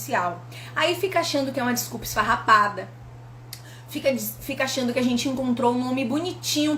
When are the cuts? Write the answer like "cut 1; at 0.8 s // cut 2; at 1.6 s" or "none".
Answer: none